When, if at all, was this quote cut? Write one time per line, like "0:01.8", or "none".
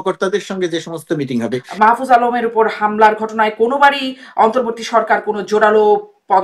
0:01.6